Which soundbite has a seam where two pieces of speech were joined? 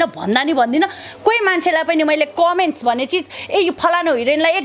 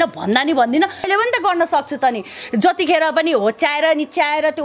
second; 1 cut; at 1.1 s

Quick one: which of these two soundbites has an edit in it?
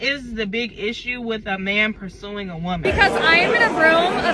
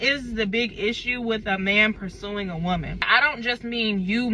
first; 1 cut; at 2.8 s

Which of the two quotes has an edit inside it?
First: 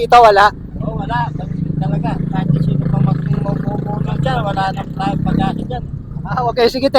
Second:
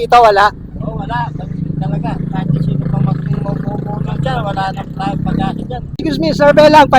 second; 1 cut; at 6.0 s

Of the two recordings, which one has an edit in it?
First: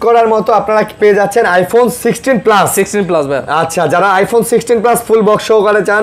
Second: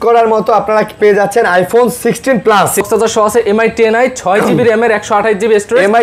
second; 1 cut; at 2.9 s

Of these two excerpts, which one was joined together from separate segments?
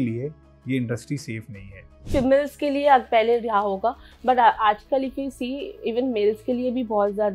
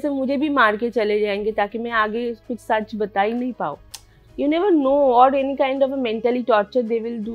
first; 1 cut; at 2.1 s

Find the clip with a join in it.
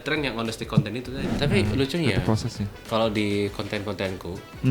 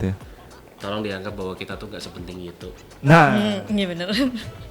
first; 1 cut; at 1.3 s

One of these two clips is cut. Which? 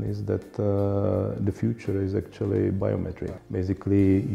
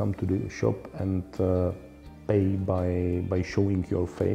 first; 1 cut; at 3.3 s

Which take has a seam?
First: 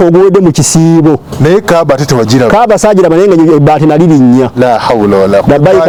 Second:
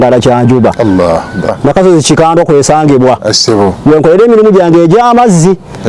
second; 1 cut; at 1.5 s

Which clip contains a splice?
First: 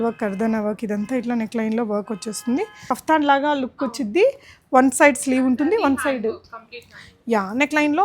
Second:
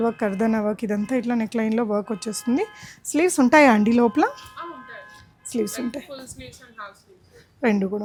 first; 1 cut; at 2.9 s

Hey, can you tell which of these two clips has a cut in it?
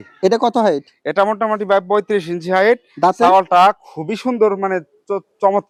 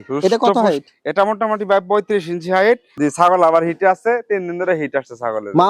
second; 1 cut; at 2.9 s

